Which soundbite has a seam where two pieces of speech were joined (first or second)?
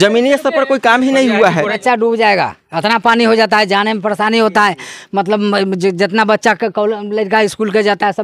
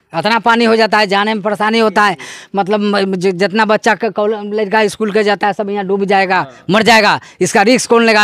first